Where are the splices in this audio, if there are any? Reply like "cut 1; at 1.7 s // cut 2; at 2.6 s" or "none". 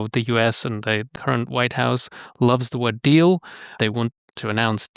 cut 1; at 1.1 s // cut 2; at 3.7 s

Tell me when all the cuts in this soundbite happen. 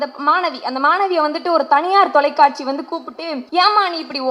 cut 1; at 3.2 s

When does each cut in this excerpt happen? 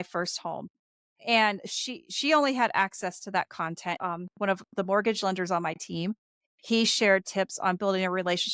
cut 1; at 4.0 s

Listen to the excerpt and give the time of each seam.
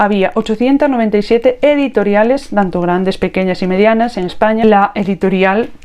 cut 1; at 4.6 s

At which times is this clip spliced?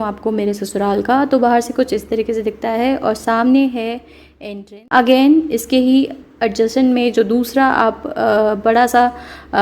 cut 1; at 4.5 s

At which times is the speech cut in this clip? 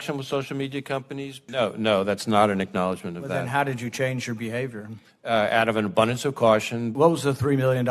cut 1; at 1.4 s // cut 2; at 6.9 s

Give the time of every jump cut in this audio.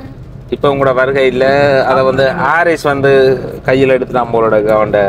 none

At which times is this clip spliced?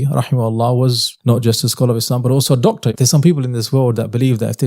cut 1; at 1.1 s // cut 2; at 2.9 s

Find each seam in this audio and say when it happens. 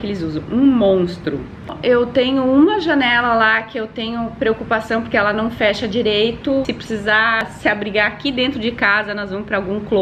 cut 1; at 1.8 s // cut 2; at 6.7 s

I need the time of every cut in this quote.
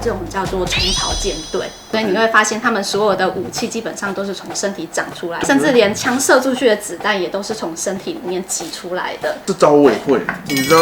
cut 1; at 1.9 s // cut 2; at 5.4 s // cut 3; at 9.4 s

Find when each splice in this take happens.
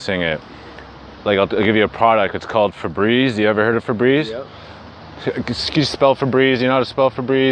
cut 1; at 1.8 s

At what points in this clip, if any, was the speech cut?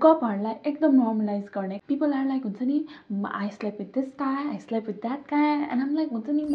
cut 1; at 1.7 s

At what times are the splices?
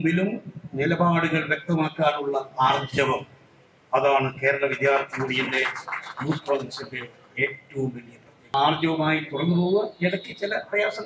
cut 1; at 8.5 s

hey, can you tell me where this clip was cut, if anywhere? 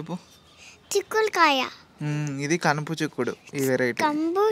none

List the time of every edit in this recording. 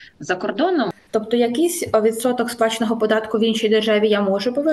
cut 1; at 0.9 s

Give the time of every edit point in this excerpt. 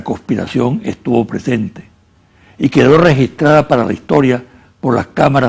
none

